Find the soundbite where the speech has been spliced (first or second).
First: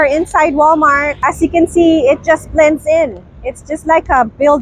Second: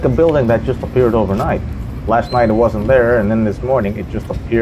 first